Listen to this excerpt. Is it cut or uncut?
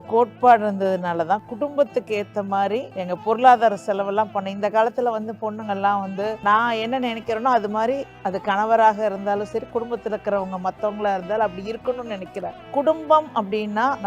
uncut